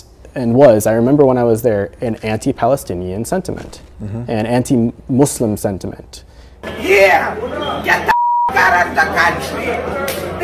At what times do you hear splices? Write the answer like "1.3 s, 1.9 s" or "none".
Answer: none